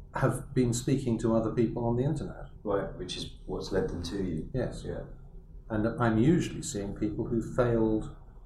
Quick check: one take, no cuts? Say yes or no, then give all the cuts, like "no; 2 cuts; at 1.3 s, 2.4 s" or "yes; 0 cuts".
no; 1 cut; at 2.4 s